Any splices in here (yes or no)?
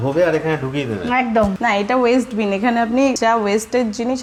no